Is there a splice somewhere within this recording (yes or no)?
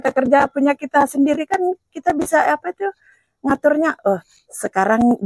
no